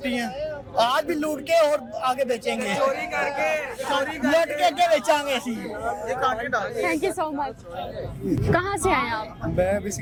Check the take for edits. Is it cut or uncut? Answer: uncut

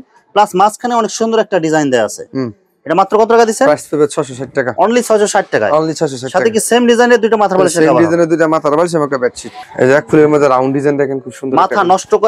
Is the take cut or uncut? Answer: uncut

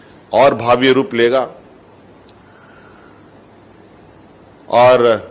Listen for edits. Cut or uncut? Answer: uncut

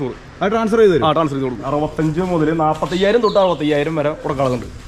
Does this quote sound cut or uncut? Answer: cut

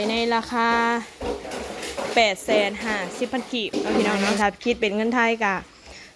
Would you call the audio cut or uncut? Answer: cut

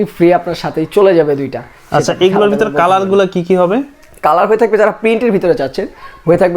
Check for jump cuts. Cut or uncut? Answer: uncut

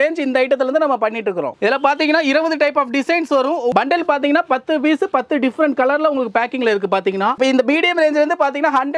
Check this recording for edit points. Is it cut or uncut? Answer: cut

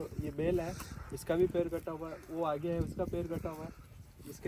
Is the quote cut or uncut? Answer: uncut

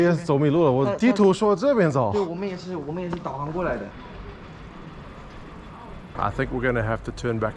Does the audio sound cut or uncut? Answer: cut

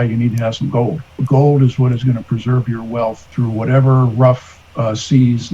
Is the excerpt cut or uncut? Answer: cut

